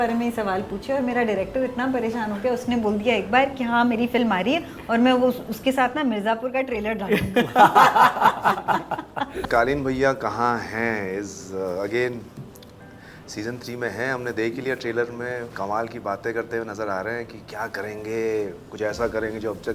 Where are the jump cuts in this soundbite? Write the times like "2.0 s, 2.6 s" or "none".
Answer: 9.4 s